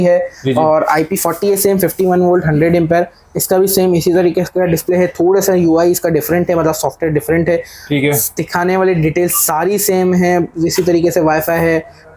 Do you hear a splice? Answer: no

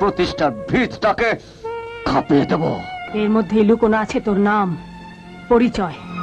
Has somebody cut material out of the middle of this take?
yes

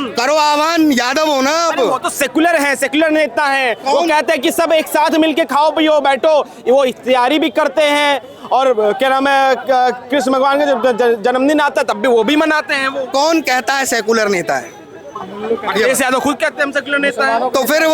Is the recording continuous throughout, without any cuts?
yes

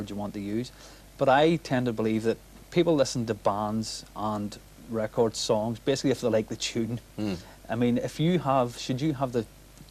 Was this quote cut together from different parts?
no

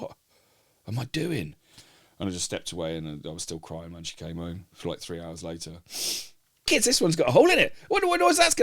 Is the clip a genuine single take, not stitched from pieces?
no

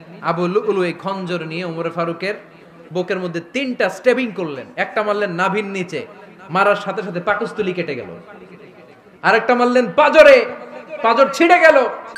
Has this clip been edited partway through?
no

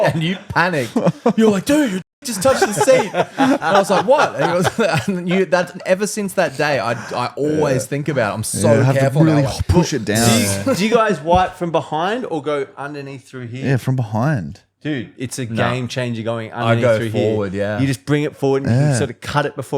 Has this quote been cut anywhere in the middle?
no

